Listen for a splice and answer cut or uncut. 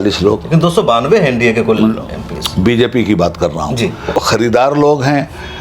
cut